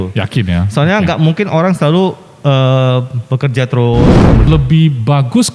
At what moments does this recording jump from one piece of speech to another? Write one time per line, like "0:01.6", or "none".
0:04.5